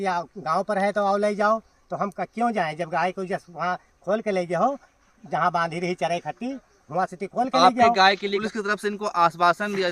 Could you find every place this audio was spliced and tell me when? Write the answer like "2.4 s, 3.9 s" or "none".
8.4 s